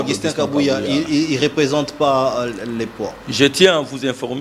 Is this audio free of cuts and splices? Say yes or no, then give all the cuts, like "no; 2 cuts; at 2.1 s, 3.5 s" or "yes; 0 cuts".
yes; 0 cuts